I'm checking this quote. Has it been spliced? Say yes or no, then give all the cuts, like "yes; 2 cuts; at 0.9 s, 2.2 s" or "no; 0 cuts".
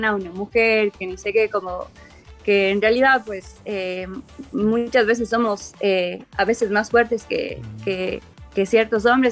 yes; 1 cut; at 8.3 s